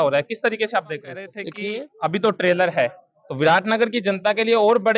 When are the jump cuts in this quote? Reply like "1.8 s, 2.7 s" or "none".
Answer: 1.4 s